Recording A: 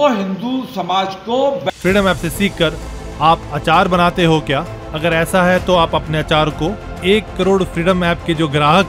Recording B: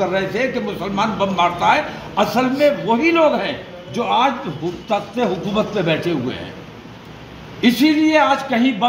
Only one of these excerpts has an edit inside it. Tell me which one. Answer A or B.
A